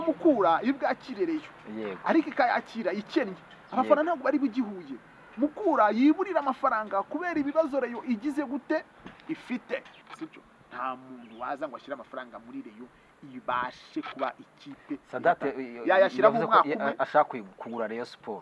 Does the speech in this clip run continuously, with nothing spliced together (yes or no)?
no